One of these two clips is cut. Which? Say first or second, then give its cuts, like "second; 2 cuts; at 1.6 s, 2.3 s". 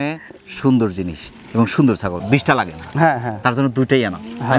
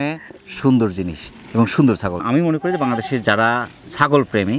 first; 1 cut; at 2.1 s